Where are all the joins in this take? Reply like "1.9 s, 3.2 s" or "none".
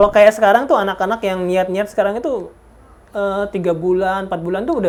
none

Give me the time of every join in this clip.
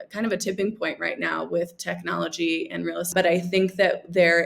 3.1 s

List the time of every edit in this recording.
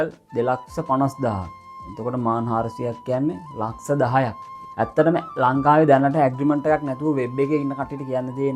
4.5 s

